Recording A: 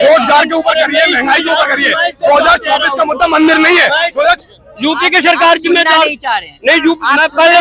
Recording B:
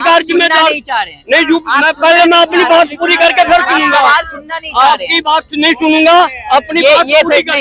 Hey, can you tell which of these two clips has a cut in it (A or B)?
A